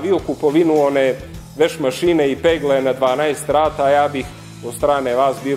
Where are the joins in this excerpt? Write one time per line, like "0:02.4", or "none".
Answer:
none